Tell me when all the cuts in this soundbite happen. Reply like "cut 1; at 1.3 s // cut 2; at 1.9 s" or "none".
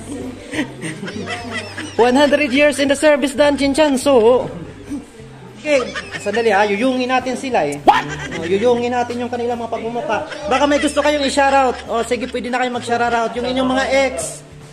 cut 1; at 5.6 s